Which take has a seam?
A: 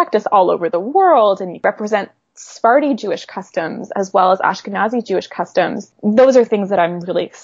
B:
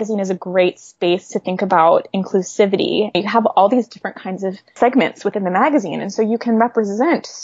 B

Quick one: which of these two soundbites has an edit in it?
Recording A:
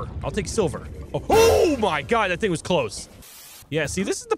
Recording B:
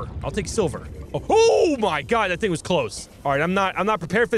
A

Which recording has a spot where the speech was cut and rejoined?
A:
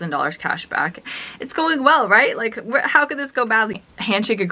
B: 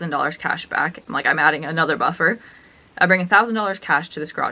A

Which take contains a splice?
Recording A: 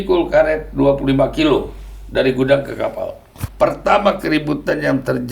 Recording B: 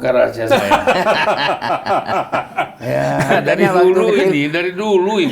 A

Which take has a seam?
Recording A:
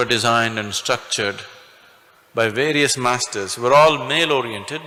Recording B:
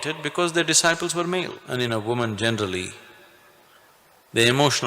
B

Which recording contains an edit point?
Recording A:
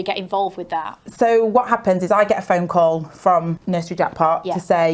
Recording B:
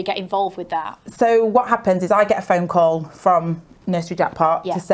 A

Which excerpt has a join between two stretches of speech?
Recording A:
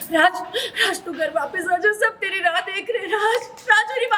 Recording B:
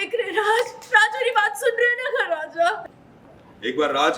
B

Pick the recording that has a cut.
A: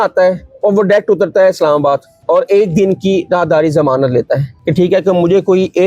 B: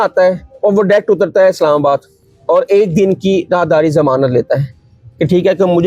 A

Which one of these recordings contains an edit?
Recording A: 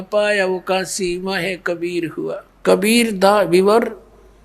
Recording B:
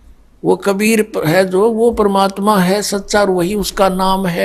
A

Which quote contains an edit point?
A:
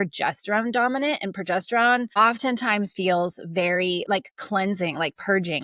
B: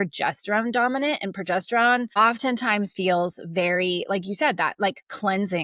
A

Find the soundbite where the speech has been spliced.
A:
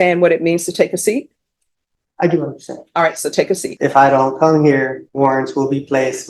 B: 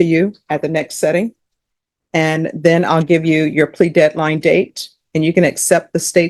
A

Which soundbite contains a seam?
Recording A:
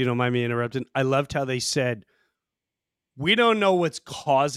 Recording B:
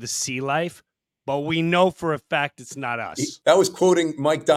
B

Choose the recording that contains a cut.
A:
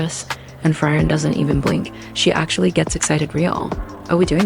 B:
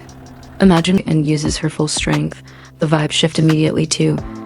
B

